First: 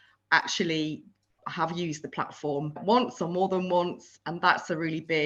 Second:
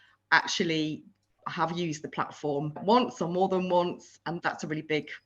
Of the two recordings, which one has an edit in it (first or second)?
second